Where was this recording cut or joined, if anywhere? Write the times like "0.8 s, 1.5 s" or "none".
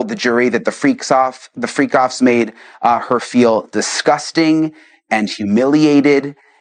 none